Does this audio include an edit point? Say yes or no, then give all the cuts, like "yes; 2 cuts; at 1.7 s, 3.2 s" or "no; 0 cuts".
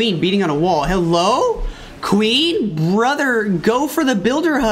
no; 0 cuts